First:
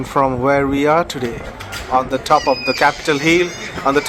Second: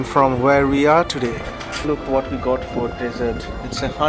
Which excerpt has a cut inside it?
second; 1 cut; at 1.7 s

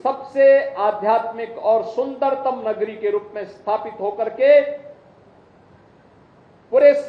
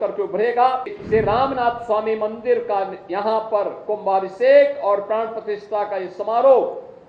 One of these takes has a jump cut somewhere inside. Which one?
second; 1 cut; at 1.0 s

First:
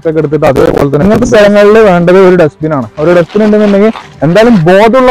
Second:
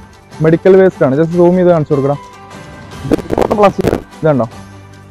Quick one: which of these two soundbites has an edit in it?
first; 1 cut; at 1.0 s

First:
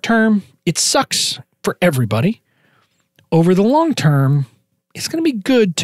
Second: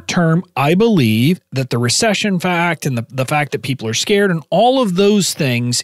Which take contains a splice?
second; 1 cut; at 1.5 s

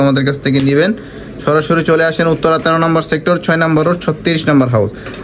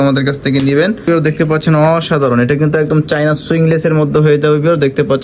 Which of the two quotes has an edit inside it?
second; 1 cut; at 1.0 s

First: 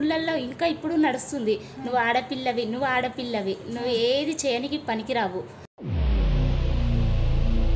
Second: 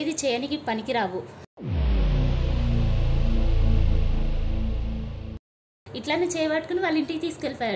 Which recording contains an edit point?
second; 1 cut; at 5.8 s

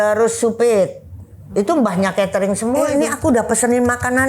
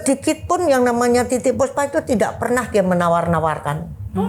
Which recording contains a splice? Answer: first; 1 cut; at 2.9 s

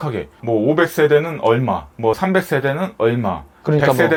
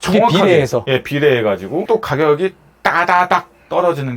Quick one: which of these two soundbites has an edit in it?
second; 1 cut; at 1.9 s

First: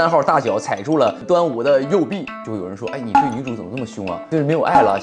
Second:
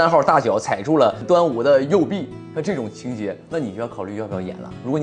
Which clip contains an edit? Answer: first; 2 cuts; at 2.4 s, 4.2 s

